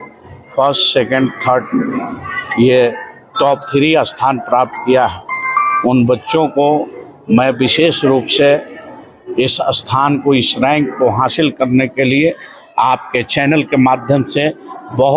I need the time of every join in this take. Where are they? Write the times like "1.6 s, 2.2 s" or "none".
none